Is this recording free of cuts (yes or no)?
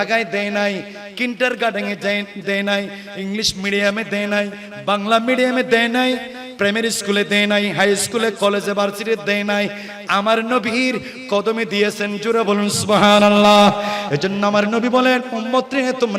yes